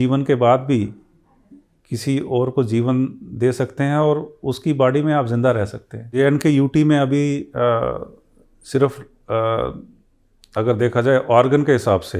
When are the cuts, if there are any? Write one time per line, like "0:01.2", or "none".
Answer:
0:06.1